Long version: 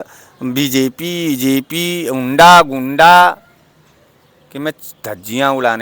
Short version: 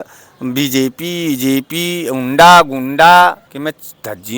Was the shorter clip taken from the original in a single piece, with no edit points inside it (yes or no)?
no